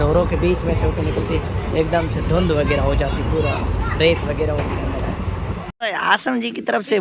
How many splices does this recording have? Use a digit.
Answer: 1